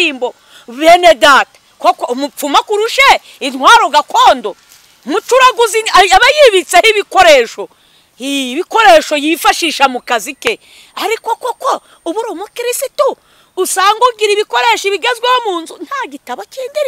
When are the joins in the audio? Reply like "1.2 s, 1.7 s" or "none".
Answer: none